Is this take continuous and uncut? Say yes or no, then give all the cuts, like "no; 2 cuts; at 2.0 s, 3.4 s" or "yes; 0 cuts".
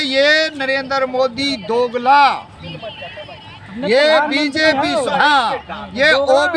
yes; 0 cuts